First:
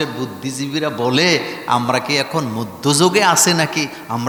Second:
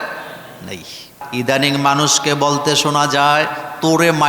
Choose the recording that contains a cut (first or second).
second